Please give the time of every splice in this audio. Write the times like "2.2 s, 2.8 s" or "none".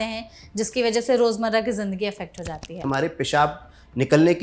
2.8 s